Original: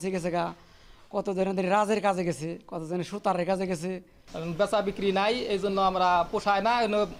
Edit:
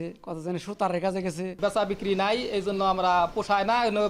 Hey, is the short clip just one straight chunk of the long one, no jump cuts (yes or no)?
no